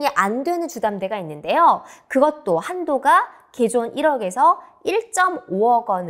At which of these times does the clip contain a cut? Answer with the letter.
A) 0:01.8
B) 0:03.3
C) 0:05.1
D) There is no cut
D